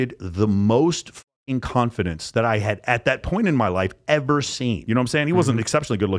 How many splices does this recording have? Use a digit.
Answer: 1